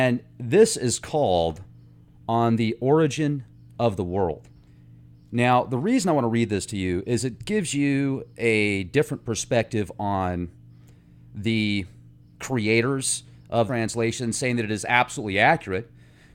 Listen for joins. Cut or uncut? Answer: uncut